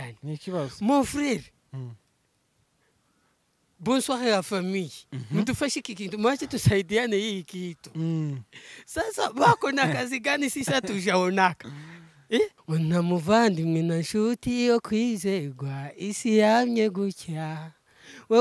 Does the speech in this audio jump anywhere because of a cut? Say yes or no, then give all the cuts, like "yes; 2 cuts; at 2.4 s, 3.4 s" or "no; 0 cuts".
yes; 1 cut; at 12.6 s